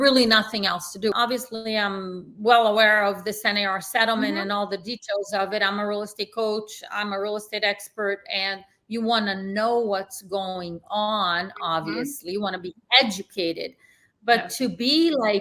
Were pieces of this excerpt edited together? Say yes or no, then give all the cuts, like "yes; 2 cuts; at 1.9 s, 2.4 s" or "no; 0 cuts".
yes; 1 cut; at 1.1 s